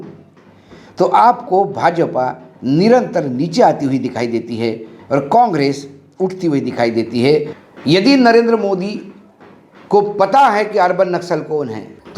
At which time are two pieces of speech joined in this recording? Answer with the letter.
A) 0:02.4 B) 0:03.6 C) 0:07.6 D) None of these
C